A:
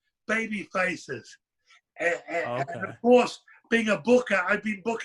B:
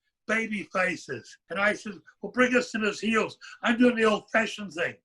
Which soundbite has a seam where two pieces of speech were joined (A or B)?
B